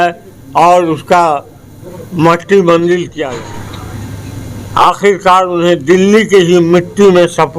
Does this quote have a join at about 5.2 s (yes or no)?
no